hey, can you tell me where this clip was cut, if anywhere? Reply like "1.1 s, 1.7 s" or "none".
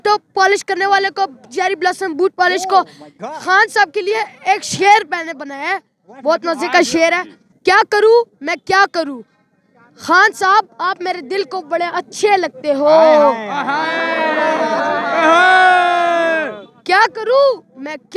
none